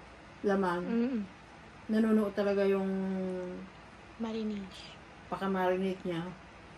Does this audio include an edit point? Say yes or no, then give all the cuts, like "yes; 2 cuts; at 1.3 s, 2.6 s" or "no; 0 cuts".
no; 0 cuts